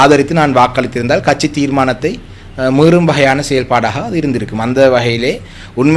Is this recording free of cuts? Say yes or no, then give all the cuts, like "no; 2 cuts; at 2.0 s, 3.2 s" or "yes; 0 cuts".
yes; 0 cuts